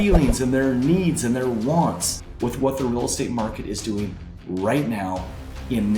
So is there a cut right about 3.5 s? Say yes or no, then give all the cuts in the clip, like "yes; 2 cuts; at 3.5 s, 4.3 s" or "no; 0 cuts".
no; 0 cuts